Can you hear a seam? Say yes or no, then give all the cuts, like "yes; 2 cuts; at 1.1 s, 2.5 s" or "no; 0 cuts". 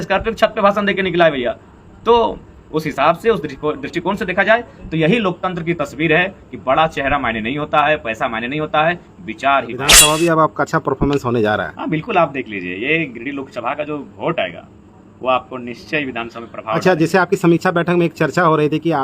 yes; 1 cut; at 9.9 s